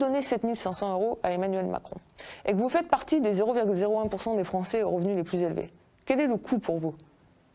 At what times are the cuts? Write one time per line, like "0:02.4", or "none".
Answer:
none